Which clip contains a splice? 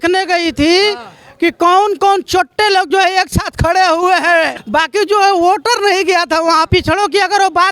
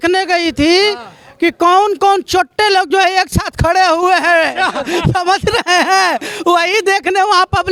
first; 2 cuts; at 4.5 s, 6.7 s

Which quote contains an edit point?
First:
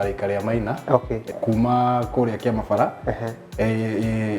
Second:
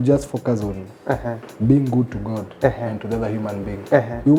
first; 1 cut; at 1.3 s

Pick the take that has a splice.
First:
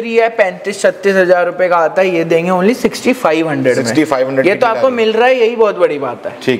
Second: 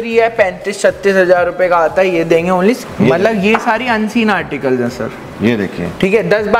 second; 1 cut; at 2.8 s

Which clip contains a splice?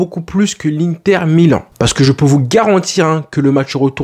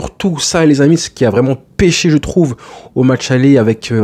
first; 1 cut; at 1.7 s

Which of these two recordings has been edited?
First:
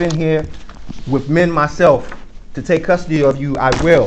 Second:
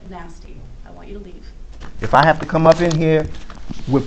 second; 1 cut; at 1.9 s

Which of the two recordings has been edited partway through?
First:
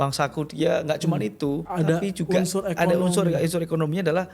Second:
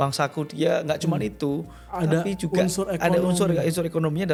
first; 1 cut; at 1.7 s

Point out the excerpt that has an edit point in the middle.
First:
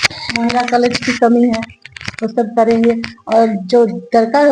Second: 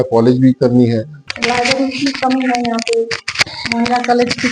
second; 1 cut; at 1.2 s

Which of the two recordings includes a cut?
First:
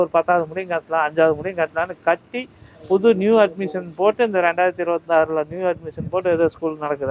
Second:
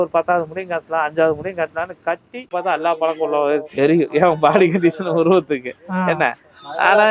second; 1 cut; at 2.5 s

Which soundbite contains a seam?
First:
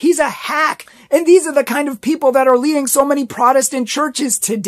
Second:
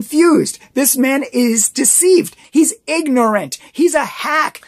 second; 1 cut; at 2.4 s

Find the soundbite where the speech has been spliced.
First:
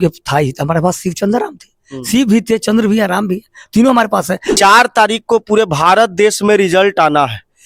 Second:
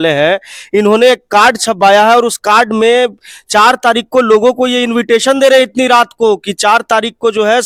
first; 1 cut; at 4.5 s

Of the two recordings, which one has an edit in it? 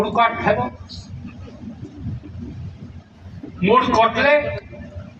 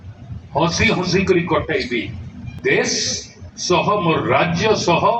second; 1 cut; at 2.5 s

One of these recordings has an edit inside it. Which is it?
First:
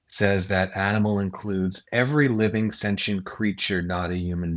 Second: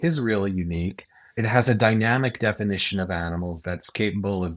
second; 1 cut; at 1.4 s

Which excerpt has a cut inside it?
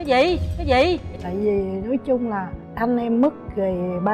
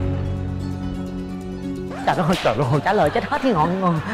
first; 1 cut; at 1.2 s

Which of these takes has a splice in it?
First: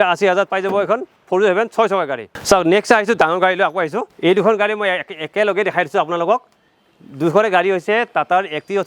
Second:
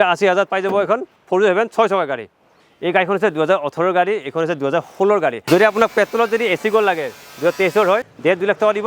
second; 3 cuts; at 2.3 s, 5.4 s, 8.1 s

